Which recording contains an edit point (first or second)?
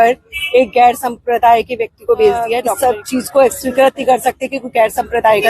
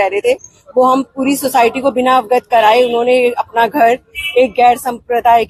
first